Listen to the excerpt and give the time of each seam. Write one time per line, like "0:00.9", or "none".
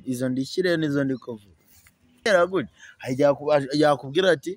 0:02.3